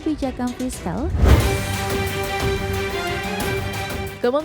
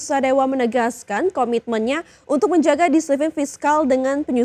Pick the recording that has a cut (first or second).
first